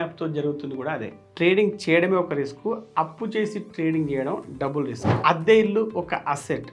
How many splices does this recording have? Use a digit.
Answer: 2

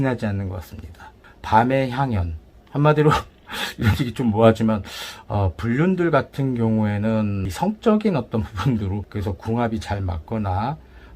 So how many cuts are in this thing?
3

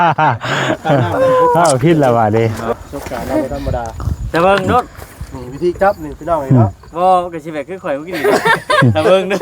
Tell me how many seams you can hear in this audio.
1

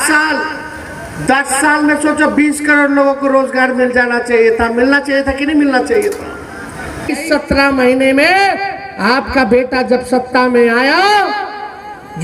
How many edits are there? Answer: 1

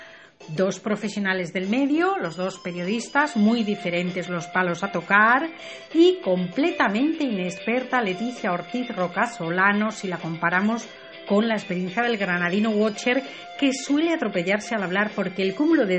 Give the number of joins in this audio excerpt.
1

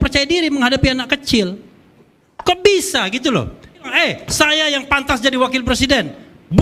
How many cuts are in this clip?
1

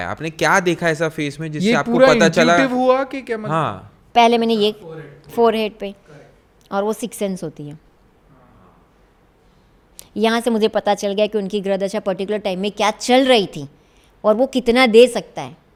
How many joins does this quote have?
0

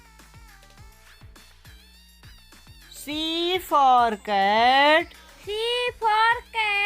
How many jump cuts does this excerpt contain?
1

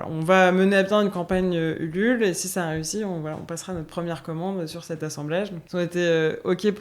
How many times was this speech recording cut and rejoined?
1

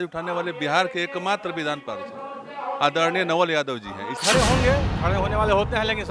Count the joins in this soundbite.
1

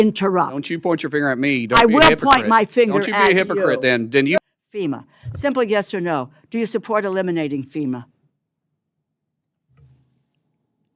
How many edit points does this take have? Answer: 1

